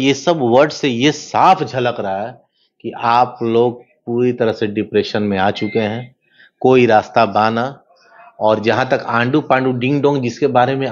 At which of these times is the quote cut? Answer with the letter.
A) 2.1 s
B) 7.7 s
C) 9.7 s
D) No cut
D